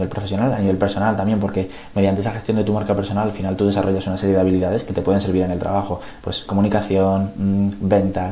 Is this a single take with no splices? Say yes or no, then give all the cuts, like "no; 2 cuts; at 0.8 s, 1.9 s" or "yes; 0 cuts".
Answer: yes; 0 cuts